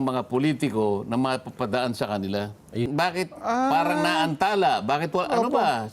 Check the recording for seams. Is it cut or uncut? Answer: cut